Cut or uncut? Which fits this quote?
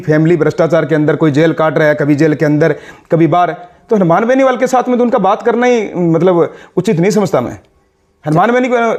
uncut